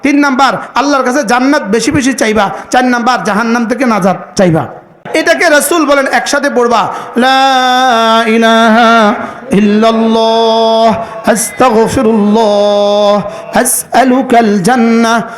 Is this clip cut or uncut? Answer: cut